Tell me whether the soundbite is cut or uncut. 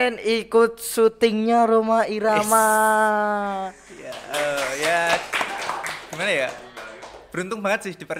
uncut